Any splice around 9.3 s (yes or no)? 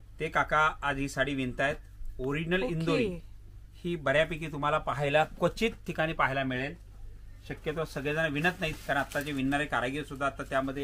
no